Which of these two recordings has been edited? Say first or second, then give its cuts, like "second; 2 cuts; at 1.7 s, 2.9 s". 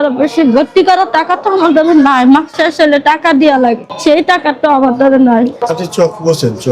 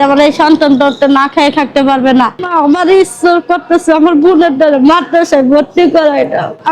second; 1 cut; at 2.4 s